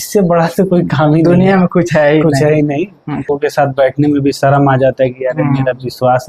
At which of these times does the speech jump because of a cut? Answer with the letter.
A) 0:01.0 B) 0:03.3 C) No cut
B